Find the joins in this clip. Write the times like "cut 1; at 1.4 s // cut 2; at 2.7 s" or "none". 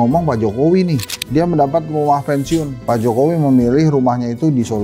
cut 1; at 1.1 s